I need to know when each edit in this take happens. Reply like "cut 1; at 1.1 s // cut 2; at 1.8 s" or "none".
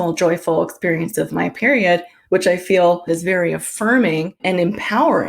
cut 1; at 2.1 s // cut 2; at 3.0 s // cut 3; at 4.4 s